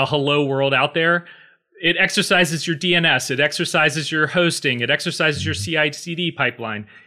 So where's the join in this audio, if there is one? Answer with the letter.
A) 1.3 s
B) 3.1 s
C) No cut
C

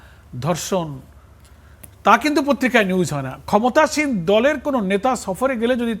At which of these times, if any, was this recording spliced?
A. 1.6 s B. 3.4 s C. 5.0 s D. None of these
B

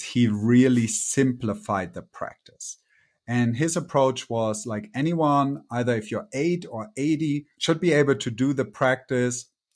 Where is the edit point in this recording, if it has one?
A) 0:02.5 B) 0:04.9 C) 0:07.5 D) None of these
C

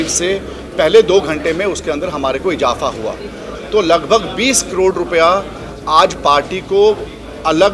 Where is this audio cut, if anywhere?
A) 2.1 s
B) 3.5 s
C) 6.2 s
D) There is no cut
B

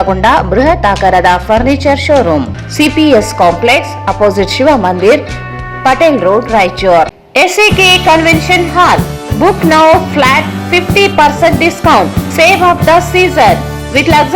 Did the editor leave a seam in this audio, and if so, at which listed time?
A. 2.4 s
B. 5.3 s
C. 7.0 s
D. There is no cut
A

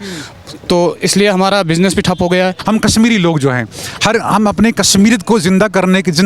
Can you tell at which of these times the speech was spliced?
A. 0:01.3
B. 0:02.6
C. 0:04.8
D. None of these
B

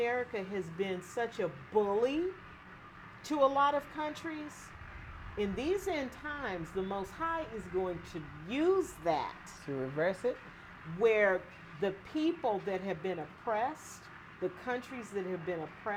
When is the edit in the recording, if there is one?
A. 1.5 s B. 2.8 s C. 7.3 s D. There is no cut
D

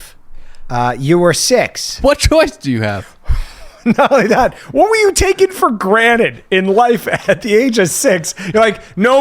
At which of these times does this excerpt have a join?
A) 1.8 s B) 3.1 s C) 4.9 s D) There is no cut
A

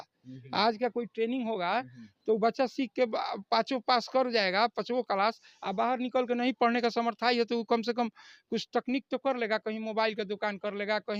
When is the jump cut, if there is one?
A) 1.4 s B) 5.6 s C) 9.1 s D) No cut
D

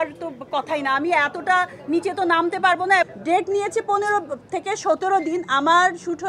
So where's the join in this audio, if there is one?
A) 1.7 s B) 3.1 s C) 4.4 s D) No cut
B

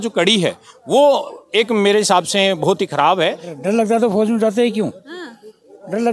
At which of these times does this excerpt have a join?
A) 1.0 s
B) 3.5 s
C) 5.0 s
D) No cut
B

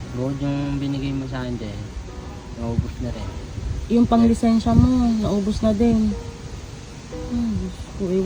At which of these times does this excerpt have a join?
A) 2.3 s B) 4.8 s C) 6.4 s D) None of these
D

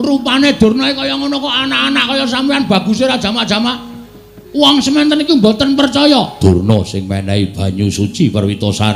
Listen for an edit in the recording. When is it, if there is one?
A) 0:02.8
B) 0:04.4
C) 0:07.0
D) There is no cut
D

